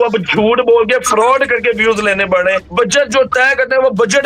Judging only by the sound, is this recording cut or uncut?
cut